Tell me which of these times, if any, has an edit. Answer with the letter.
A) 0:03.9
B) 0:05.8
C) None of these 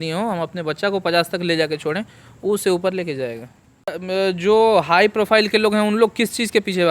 A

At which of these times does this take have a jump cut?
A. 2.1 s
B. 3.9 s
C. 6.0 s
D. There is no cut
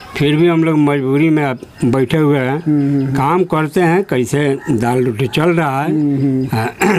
D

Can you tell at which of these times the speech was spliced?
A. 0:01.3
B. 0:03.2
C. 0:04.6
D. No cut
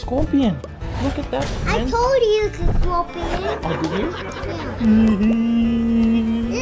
D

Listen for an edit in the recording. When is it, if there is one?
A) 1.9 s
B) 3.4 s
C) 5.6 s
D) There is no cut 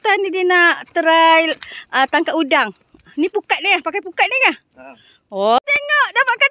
C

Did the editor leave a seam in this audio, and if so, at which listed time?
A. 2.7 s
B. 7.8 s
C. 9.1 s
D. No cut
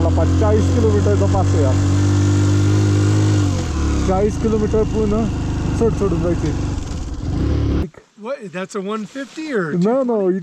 B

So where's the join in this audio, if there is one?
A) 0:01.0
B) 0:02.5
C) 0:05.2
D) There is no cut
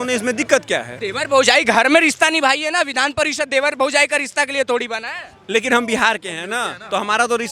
A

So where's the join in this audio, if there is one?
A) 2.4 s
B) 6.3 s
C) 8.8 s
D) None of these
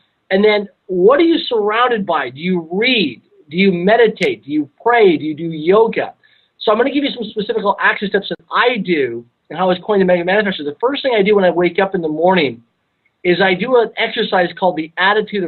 D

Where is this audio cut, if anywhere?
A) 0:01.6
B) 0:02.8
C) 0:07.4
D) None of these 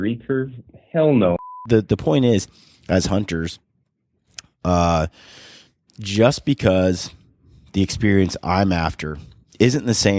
A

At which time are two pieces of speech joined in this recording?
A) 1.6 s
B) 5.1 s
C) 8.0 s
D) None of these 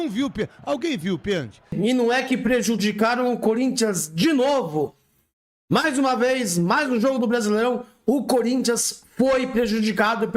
A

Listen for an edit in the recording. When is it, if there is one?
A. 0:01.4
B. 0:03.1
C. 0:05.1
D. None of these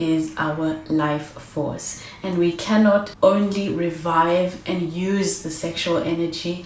B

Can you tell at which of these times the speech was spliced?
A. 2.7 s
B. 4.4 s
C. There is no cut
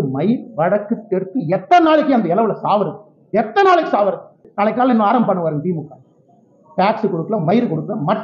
B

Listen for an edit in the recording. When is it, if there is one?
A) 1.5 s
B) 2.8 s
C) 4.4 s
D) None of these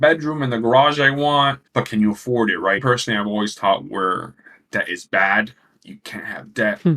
B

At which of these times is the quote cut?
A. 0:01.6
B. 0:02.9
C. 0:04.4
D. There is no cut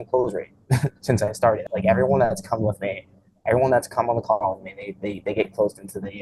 A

